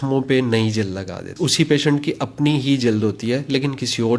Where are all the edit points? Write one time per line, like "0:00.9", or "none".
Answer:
0:01.3